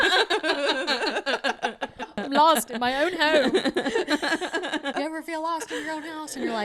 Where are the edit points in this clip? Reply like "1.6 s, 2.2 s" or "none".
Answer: 2.1 s, 4.9 s